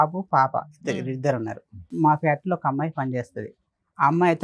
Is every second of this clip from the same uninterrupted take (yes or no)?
no